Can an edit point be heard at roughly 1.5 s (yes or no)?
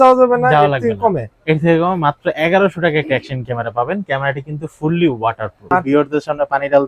no